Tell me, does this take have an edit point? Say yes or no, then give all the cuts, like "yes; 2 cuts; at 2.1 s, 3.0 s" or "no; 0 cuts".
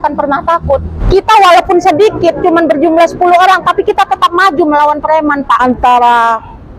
yes; 2 cuts; at 0.9 s, 5.6 s